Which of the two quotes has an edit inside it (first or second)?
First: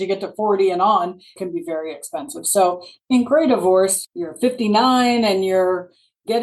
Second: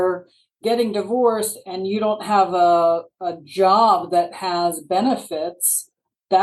first